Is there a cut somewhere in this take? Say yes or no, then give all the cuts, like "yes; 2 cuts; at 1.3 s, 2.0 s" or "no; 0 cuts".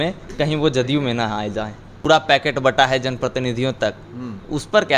yes; 1 cut; at 1.9 s